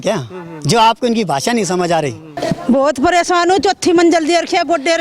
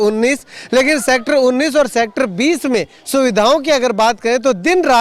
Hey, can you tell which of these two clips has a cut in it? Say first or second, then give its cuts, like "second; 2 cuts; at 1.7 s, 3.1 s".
first; 1 cut; at 2.3 s